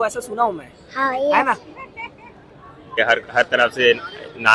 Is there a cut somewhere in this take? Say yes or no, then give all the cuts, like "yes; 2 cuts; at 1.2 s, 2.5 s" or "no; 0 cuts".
yes; 1 cut; at 3.0 s